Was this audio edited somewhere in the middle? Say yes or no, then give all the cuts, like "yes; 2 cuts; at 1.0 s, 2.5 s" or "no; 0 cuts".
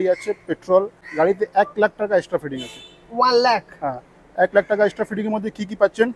yes; 1 cut; at 1.0 s